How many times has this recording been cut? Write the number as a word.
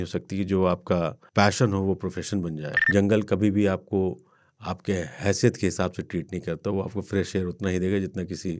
two